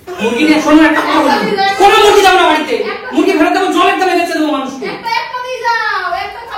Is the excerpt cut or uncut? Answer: uncut